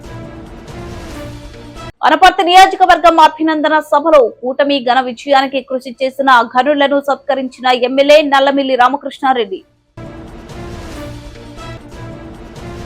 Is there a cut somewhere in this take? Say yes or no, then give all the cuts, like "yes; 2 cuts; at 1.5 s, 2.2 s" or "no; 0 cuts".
yes; 1 cut; at 1.9 s